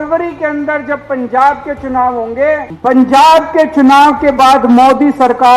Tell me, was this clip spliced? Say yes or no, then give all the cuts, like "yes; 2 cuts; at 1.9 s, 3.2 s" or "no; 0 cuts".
yes; 1 cut; at 2.7 s